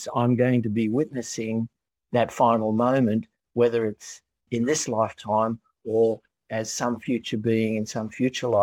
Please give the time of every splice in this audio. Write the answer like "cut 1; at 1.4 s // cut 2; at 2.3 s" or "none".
cut 1; at 4.5 s // cut 2; at 6.4 s